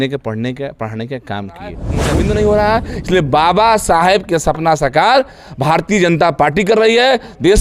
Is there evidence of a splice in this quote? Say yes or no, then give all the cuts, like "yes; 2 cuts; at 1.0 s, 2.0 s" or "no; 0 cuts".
yes; 1 cut; at 1.9 s